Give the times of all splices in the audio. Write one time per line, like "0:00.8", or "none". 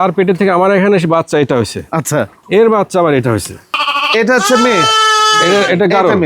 0:03.7

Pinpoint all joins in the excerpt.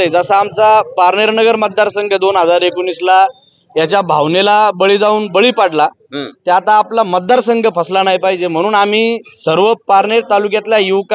none

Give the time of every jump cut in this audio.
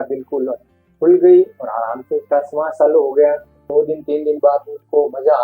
0:03.6

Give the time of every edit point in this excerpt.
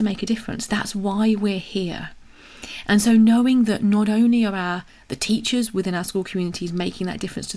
none

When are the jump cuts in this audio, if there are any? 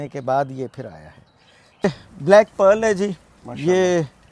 none

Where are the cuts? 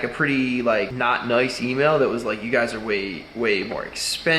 0:00.9

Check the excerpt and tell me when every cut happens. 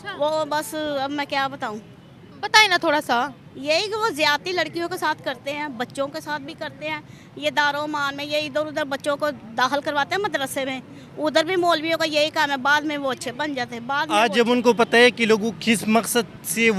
0:14.1

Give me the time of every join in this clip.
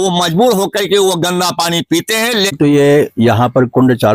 0:02.5

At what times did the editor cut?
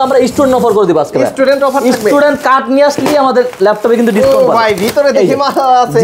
none

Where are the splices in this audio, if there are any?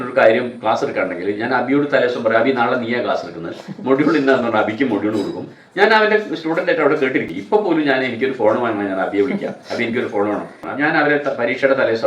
0:07.3
0:10.7

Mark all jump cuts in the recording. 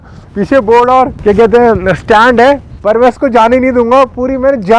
0:01.1
0:02.7

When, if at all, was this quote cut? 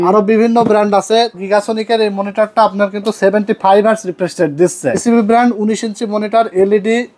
0:01.4
0:05.0

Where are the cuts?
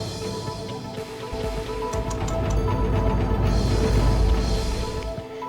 0:01.3

